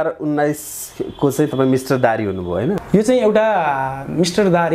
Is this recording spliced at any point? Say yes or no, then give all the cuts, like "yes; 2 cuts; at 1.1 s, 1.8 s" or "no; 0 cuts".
yes; 1 cut; at 2.8 s